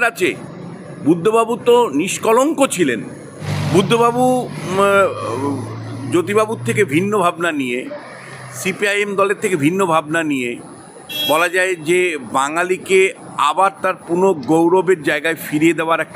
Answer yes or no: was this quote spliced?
yes